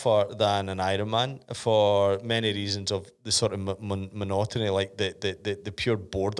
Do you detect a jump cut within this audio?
no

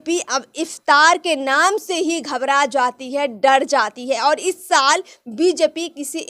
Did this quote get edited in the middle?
no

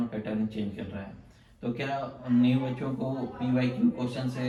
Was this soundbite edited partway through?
no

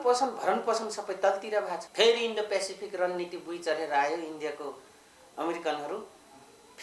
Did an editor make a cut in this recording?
yes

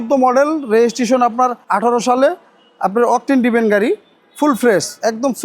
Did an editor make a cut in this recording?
yes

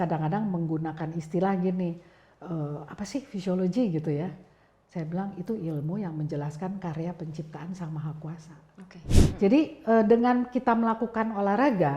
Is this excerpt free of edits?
no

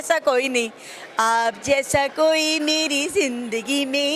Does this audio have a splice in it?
no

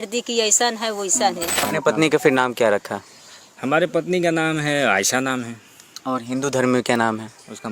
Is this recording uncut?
no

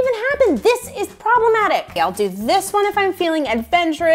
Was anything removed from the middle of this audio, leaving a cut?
yes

